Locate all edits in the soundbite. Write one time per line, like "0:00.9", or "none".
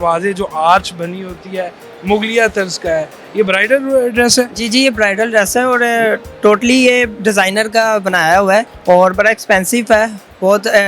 0:08.7

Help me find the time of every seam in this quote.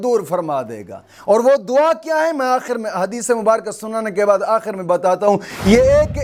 none

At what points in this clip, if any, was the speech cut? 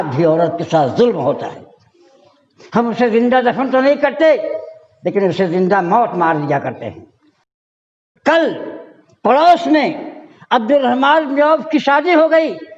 0:07.7

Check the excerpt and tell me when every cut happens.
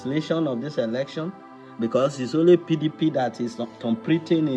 none

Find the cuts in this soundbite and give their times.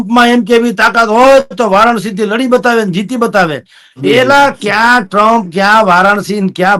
none

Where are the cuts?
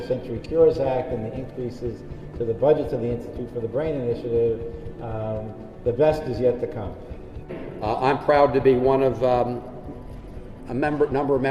0:07.5

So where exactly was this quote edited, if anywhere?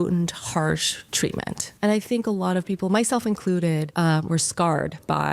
0:01.5
0:03.9

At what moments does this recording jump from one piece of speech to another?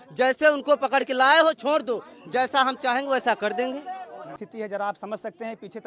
0:04.4

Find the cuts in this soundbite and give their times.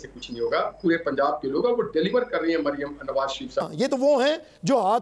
0:03.6

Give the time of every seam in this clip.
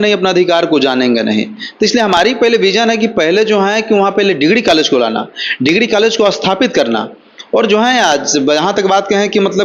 none

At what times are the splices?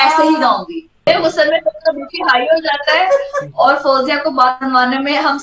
0:01.1

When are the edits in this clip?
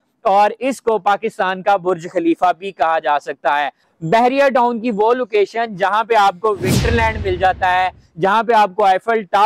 0:03.9

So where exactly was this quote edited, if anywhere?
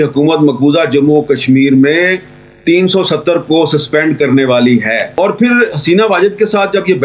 0:05.1

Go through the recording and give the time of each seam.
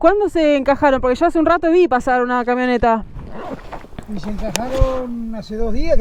none

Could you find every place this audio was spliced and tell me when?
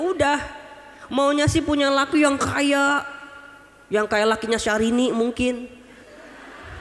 none

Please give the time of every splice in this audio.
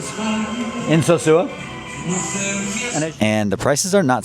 0:02.9

